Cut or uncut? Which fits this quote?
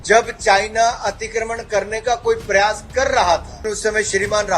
cut